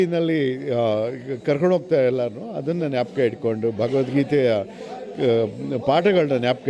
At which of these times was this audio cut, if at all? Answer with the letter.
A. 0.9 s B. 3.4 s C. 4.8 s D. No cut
D